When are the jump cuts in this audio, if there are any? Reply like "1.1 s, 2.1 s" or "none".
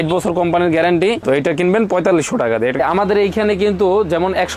1.2 s, 2.8 s